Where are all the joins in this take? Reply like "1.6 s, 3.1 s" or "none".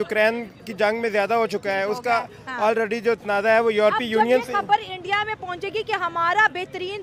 none